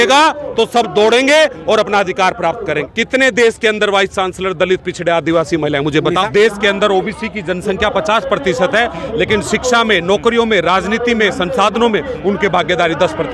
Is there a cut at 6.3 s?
yes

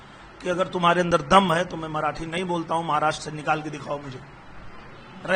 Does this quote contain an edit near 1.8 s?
no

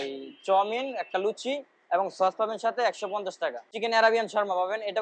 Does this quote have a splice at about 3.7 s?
yes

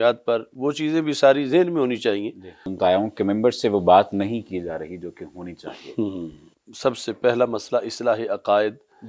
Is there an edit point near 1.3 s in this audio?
no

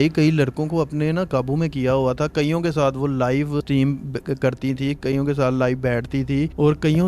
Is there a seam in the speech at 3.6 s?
yes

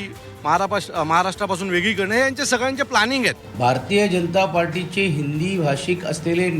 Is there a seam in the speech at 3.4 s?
yes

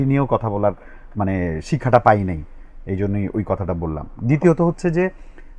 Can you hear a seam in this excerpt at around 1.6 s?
no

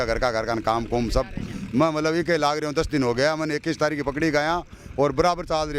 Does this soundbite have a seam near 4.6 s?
no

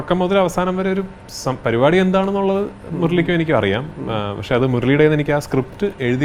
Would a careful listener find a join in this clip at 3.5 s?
no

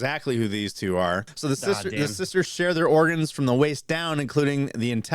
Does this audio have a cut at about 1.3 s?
yes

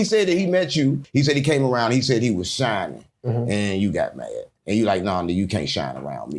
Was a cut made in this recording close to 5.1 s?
no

